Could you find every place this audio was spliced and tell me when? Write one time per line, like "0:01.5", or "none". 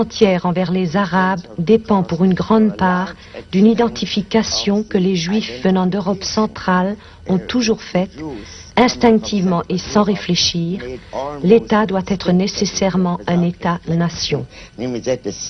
0:01.0